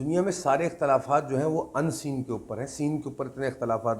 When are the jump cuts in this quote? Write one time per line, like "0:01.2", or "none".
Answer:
none